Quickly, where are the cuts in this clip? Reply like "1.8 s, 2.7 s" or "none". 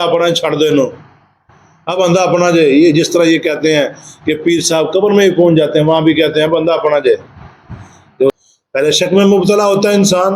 8.4 s